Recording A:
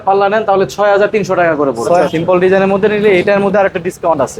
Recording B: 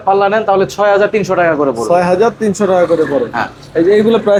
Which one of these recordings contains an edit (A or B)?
A